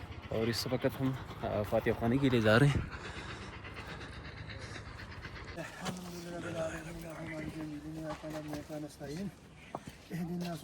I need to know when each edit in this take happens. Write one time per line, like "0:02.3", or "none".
0:05.6